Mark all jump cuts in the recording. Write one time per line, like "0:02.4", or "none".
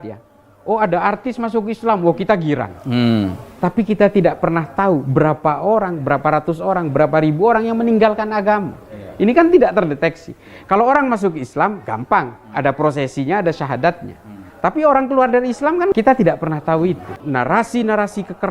0:17.1